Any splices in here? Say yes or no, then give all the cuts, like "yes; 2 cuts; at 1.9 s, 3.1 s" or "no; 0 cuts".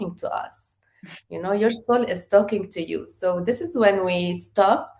no; 0 cuts